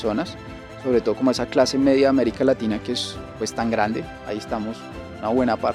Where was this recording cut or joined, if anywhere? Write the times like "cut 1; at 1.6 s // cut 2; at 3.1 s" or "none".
none